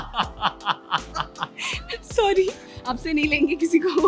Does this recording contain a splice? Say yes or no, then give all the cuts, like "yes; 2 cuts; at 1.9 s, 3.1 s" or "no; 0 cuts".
yes; 1 cut; at 2.7 s